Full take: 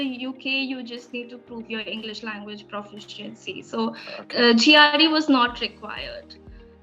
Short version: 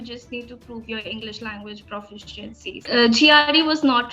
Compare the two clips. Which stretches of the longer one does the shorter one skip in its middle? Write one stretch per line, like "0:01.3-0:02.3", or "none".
0:03.6-0:04.3